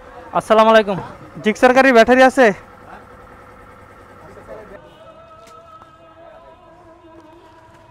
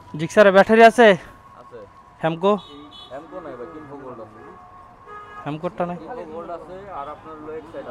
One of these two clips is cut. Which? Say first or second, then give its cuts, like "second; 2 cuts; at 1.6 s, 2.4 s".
first; 1 cut; at 4.7 s